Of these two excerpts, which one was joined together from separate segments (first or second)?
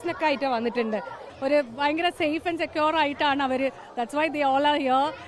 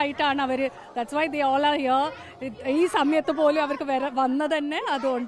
first